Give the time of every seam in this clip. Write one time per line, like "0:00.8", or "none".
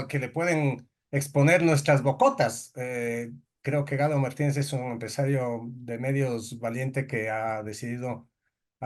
none